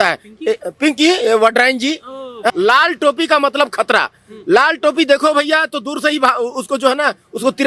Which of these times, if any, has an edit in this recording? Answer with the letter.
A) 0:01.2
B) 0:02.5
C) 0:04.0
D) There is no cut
B